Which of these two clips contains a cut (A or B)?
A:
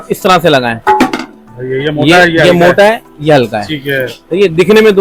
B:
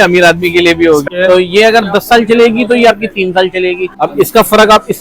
B